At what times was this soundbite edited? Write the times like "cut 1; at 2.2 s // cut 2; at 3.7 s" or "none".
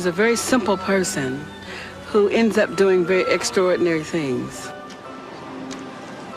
cut 1; at 2.4 s